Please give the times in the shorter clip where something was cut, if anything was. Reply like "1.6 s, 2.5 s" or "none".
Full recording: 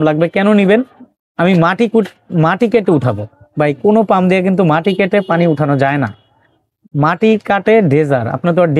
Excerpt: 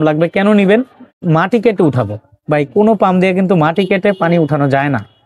1.1 s